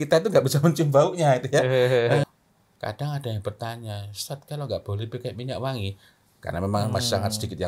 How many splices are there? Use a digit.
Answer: 1